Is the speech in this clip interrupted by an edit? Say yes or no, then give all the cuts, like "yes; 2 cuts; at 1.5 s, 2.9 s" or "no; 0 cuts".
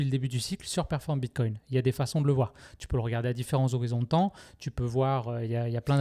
no; 0 cuts